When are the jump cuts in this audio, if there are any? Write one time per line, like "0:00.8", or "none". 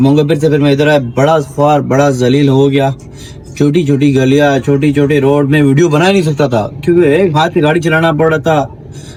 none